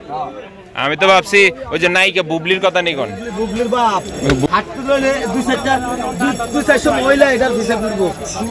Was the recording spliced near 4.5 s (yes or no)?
yes